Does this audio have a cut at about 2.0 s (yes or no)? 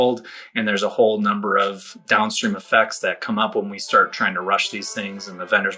yes